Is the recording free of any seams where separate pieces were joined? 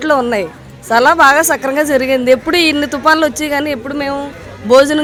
yes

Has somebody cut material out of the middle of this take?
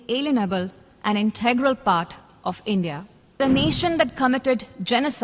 yes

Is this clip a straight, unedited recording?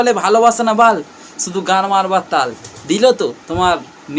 yes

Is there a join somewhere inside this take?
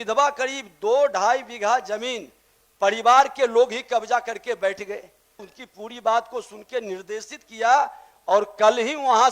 yes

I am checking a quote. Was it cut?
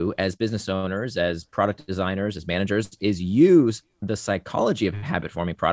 no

